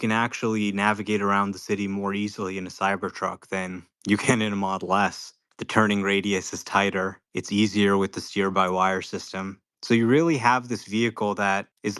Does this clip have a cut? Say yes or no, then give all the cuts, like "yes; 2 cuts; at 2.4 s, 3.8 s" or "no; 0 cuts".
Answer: no; 0 cuts